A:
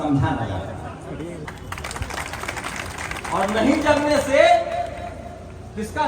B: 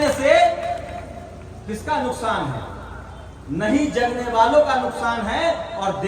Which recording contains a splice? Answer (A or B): A